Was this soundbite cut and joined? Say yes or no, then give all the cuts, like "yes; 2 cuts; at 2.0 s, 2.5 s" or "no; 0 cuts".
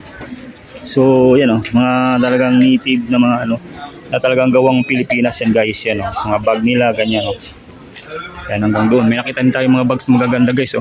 no; 0 cuts